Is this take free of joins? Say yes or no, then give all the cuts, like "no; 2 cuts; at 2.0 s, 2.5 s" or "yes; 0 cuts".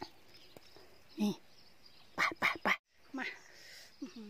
no; 1 cut; at 2.8 s